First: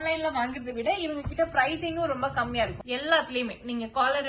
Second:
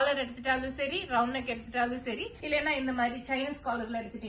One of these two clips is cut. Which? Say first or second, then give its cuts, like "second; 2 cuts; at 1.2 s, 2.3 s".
first; 1 cut; at 2.8 s